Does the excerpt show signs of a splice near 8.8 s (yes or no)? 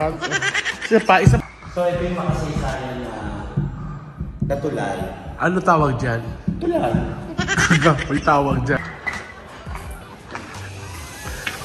yes